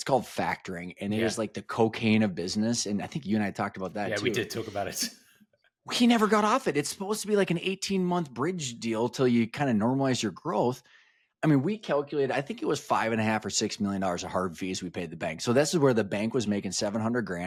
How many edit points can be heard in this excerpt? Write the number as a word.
zero